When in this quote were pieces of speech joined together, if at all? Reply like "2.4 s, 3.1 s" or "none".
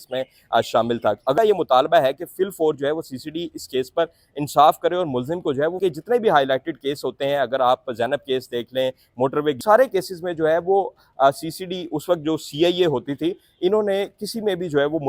1.3 s, 5.8 s, 9.6 s